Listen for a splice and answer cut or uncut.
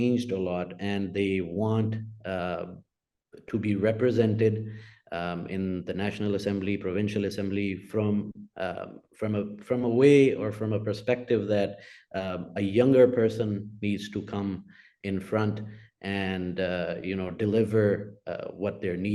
uncut